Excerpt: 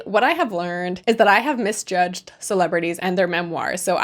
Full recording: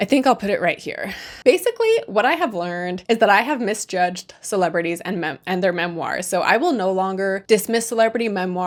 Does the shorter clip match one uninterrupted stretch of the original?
no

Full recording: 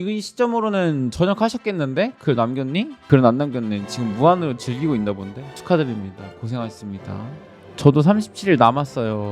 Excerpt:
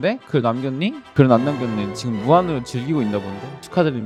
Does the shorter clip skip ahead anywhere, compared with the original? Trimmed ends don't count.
no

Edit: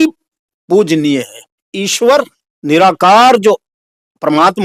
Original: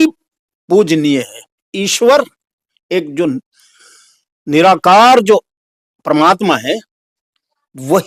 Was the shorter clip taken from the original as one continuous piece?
no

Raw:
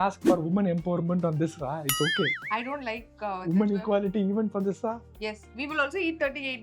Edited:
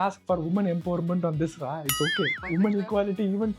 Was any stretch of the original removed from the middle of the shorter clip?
yes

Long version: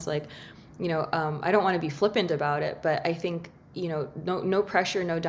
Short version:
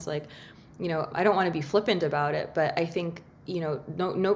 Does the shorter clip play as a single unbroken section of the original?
no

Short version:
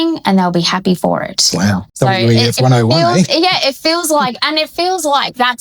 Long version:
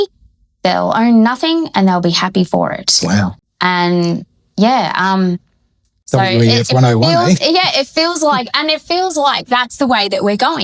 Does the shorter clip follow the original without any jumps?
no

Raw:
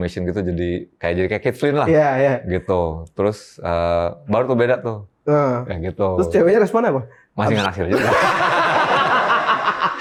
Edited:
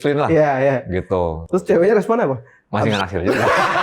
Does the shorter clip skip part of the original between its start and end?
yes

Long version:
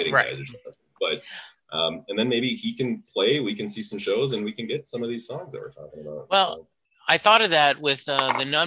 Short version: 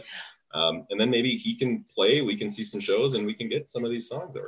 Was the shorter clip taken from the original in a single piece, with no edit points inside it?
yes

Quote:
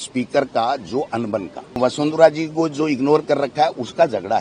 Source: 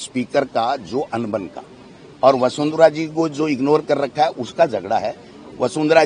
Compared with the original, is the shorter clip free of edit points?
no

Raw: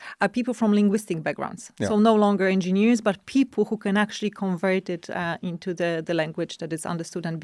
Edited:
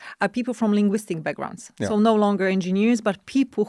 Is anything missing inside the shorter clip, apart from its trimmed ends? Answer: no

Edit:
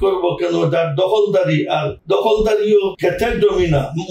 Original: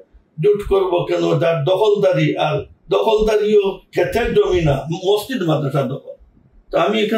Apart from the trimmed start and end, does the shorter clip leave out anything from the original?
yes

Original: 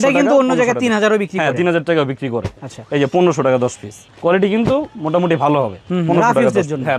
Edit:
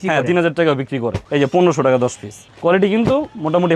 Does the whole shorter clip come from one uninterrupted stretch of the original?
no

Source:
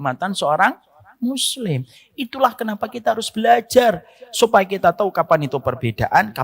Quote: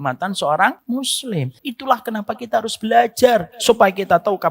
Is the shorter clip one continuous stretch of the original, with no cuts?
no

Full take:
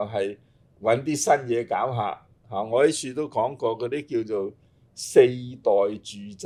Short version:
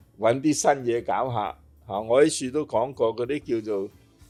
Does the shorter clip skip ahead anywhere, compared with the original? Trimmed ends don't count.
no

